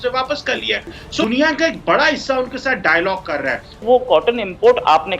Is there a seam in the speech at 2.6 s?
no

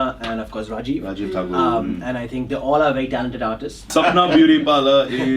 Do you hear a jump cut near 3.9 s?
yes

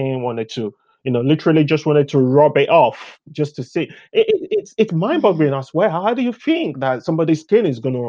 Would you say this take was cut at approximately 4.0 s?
no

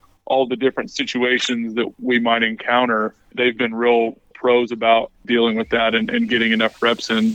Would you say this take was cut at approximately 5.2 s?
yes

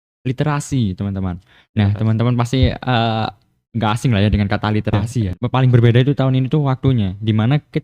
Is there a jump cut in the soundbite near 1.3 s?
no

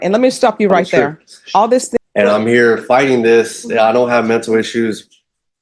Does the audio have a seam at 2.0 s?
yes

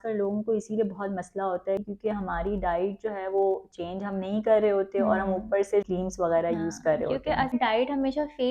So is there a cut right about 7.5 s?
yes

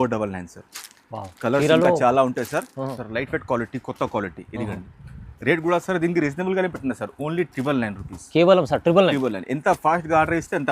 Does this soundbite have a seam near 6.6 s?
no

